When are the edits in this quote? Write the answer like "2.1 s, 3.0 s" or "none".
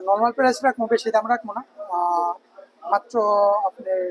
none